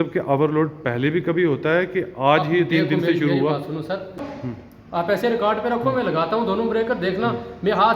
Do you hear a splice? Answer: yes; 1 cut; at 4.3 s

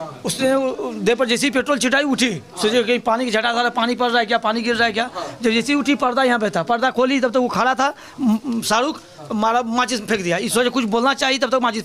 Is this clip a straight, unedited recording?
yes; 0 cuts

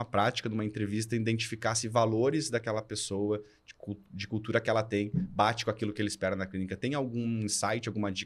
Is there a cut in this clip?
no; 0 cuts

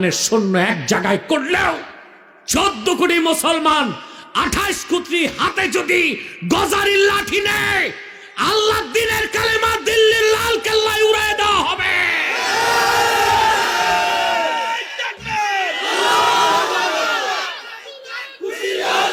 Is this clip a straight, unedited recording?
yes; 0 cuts

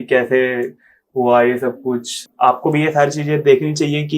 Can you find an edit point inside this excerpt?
yes; 1 cut; at 2.2 s

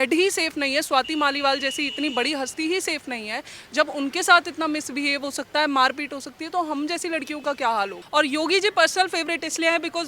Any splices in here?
yes; 1 cut; at 8.0 s

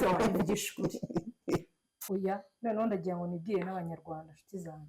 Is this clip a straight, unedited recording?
no; 1 cut; at 1.9 s

